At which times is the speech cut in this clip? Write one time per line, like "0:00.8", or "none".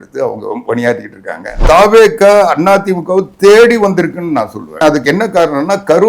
0:01.6
0:04.8